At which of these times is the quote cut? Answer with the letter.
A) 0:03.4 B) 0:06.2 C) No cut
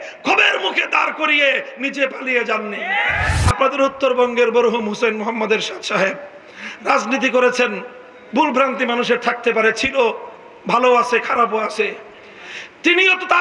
A